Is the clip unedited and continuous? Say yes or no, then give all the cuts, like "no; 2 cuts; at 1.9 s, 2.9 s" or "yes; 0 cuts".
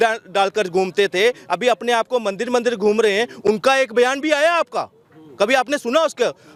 yes; 0 cuts